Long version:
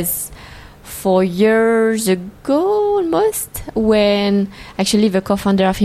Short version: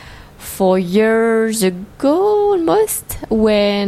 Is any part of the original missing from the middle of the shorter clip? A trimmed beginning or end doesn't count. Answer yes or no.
no